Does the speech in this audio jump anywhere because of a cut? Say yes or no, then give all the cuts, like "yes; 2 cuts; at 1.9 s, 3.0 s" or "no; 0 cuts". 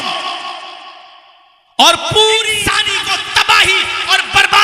yes; 1 cut; at 2.6 s